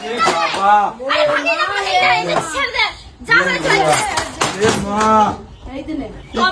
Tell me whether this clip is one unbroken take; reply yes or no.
yes